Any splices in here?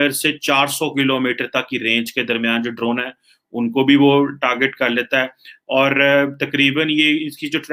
no; 0 cuts

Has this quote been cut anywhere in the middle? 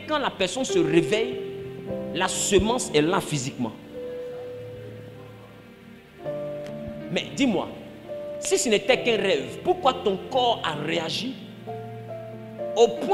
no; 0 cuts

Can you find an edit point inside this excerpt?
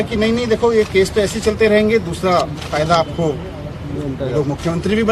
no; 0 cuts

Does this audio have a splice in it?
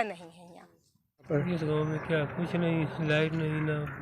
yes; 1 cut; at 1.3 s

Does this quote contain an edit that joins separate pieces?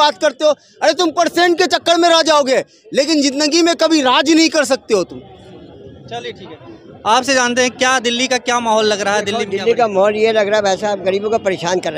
no; 0 cuts

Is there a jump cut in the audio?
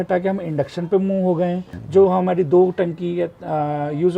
yes; 1 cut; at 1.7 s

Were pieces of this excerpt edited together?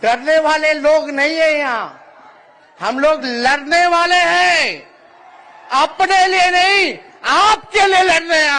no; 0 cuts

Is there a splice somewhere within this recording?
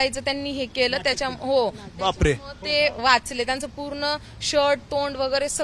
no; 0 cuts

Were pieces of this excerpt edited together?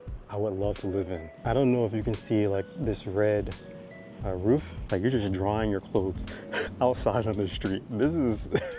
yes; 2 cuts; at 1.4 s, 4.7 s

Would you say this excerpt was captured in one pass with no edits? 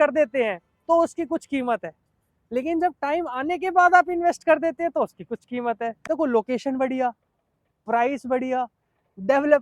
no; 1 cut; at 6.0 s

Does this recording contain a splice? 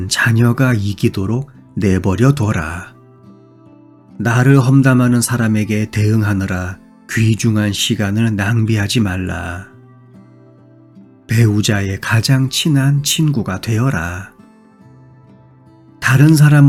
no; 0 cuts

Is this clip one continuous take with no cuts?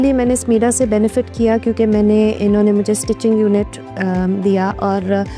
yes; 0 cuts

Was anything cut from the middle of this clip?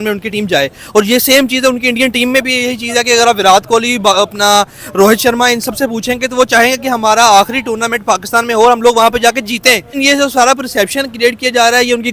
yes; 1 cut; at 9.9 s

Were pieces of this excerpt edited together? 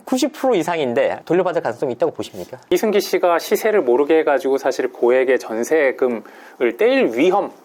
yes; 2 cuts; at 1.2 s, 2.6 s

